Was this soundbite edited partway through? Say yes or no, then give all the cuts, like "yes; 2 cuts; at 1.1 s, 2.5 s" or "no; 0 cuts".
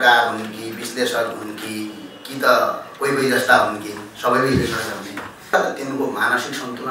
yes; 1 cut; at 5.5 s